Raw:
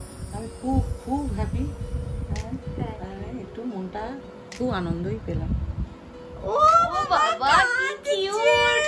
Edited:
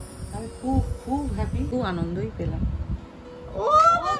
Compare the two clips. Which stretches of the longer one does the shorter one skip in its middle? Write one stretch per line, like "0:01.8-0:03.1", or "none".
0:01.7-0:04.6